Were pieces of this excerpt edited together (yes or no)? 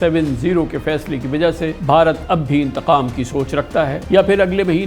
yes